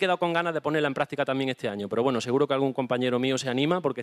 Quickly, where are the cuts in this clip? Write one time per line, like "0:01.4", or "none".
none